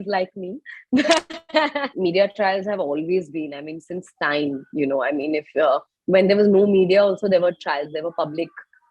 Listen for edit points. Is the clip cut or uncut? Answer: cut